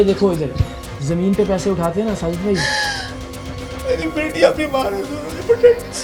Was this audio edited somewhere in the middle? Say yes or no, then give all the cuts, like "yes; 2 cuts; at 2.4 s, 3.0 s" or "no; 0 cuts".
no; 0 cuts